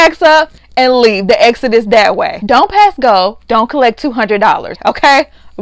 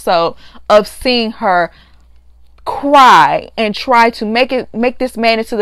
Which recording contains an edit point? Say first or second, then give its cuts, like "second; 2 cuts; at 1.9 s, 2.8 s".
first; 2 cuts; at 2.4 s, 4.7 s